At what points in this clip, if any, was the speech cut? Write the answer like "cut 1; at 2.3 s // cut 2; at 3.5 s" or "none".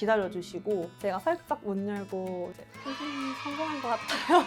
cut 1; at 0.9 s